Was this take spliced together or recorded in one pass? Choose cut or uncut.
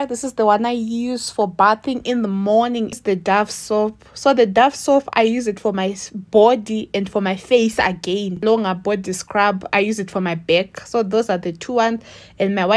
cut